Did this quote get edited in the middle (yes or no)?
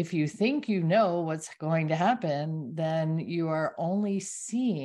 no